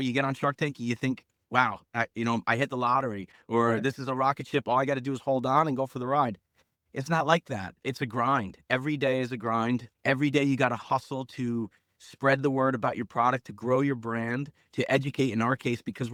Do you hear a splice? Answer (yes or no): no